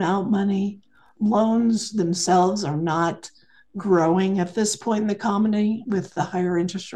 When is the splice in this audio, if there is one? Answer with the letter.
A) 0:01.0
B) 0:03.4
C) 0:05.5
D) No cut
A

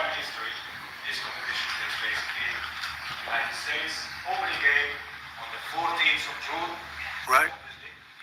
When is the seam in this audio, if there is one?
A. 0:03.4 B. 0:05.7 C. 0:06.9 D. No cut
D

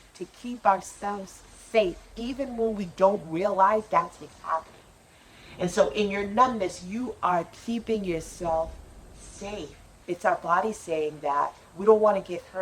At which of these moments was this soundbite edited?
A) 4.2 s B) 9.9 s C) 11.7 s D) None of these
B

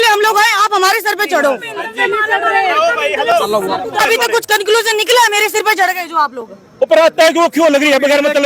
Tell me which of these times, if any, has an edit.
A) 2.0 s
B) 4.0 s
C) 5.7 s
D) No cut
B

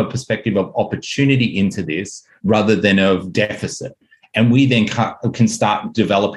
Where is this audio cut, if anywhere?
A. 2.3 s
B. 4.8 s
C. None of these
C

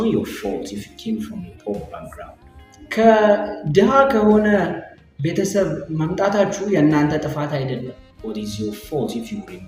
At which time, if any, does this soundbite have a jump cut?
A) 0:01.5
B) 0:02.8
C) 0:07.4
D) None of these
D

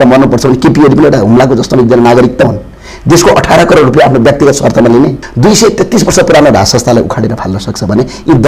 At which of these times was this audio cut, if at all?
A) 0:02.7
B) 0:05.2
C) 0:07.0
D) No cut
B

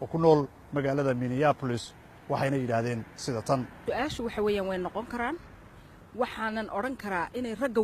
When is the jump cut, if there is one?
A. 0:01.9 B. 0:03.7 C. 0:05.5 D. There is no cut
A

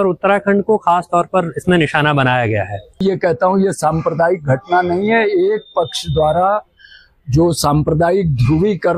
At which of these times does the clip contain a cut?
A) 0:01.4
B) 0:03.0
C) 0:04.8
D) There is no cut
B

